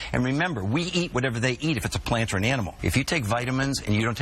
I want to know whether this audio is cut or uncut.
cut